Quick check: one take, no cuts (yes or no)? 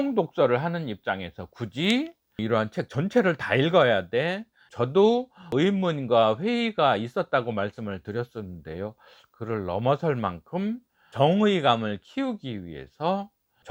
yes